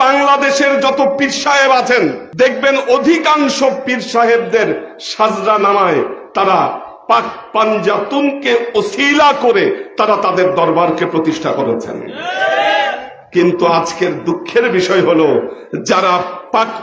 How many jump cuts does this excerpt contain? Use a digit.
1